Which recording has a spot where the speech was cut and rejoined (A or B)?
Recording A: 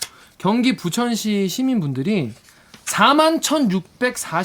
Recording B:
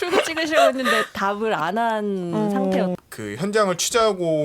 B